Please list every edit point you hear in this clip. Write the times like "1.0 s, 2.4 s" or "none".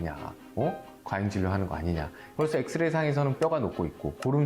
2.2 s, 3.5 s